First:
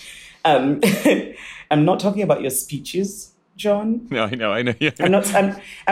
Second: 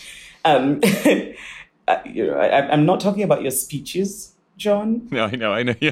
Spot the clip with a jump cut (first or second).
first